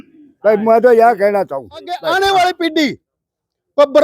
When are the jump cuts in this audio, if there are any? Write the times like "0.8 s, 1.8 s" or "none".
2.0 s